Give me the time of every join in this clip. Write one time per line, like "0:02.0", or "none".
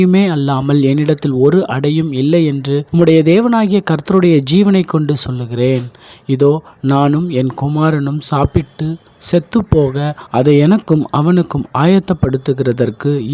none